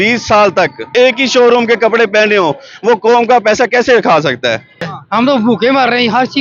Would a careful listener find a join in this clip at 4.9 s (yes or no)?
yes